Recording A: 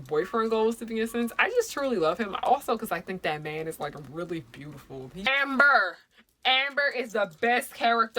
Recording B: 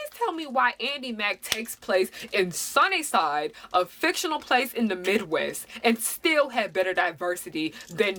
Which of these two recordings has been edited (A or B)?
A